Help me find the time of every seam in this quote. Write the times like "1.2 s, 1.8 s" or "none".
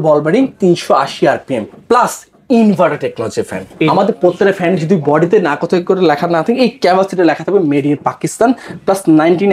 3.9 s

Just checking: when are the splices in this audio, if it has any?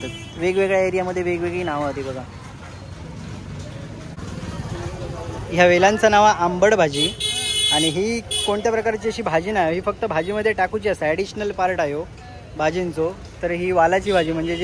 4.1 s

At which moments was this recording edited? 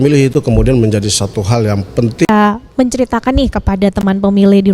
2.3 s

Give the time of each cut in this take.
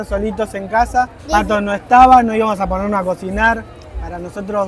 1.2 s

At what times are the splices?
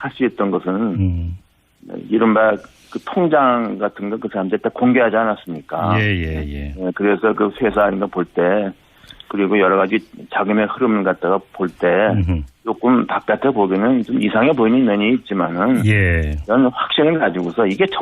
16.8 s

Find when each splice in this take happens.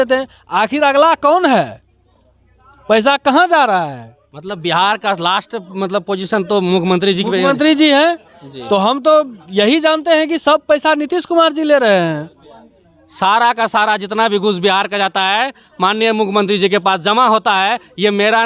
none

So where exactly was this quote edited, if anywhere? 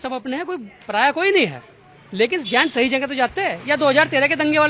none

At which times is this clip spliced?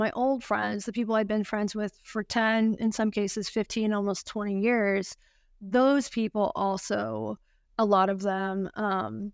none

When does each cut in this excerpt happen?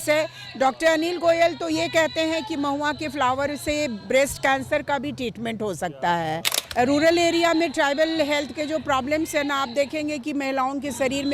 6.5 s

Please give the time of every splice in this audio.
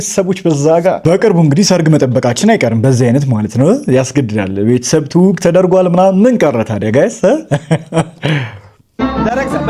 none

